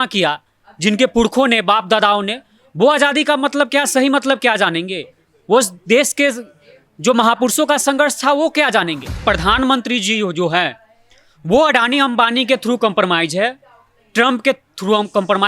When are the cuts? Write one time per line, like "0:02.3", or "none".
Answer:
0:09.2